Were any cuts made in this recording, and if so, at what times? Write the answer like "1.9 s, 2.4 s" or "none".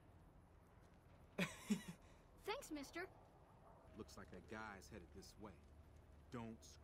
3.8 s